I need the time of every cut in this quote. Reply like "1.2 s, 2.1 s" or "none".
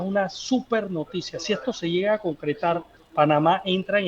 3.0 s